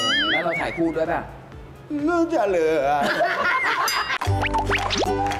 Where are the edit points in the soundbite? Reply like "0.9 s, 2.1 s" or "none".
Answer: 4.2 s